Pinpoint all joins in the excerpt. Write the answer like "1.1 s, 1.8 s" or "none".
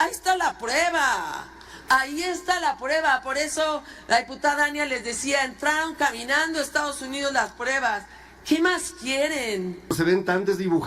9.9 s